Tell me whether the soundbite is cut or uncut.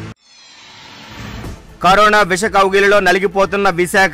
uncut